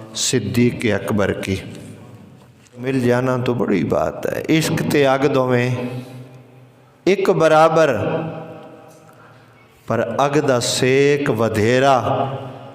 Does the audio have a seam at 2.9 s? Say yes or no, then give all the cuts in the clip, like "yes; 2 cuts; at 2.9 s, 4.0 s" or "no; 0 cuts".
yes; 1 cut; at 2.9 s